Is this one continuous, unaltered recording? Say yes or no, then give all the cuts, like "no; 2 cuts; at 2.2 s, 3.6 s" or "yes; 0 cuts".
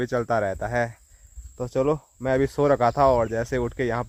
yes; 0 cuts